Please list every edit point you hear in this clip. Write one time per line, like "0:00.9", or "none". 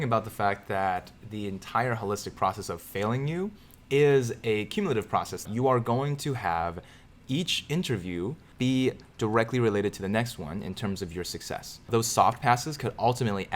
0:05.4
0:11.9